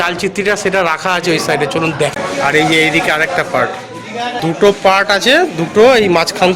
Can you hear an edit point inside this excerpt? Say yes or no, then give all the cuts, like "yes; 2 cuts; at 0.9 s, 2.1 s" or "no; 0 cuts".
yes; 2 cuts; at 2.1 s, 4.4 s